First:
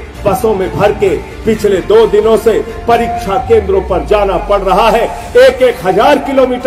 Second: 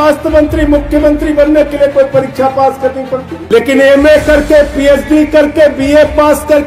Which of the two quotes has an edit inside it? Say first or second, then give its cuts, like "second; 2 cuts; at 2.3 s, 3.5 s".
second; 1 cut; at 3.3 s